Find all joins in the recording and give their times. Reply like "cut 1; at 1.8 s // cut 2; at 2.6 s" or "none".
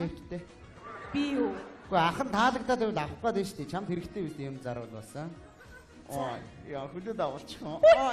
none